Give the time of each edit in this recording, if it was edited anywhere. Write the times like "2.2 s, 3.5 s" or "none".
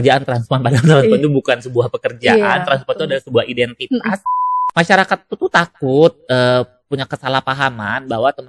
4.4 s